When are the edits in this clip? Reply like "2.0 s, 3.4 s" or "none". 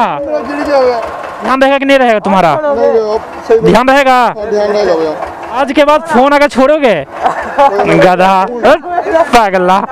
1.5 s, 5.6 s